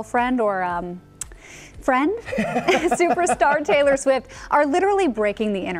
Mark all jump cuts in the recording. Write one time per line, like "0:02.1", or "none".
none